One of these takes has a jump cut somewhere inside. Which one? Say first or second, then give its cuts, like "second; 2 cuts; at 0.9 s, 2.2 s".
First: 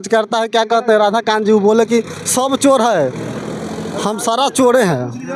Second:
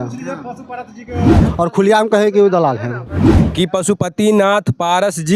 second; 2 cuts; at 1.4 s, 3.4 s